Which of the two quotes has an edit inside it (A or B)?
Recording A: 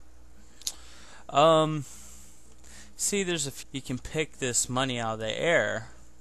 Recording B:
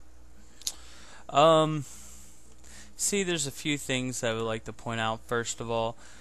B